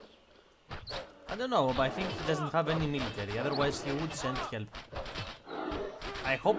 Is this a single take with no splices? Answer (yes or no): yes